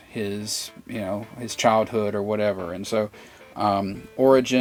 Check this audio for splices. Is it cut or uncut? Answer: uncut